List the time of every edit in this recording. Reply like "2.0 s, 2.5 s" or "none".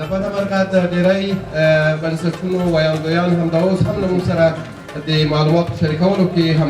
none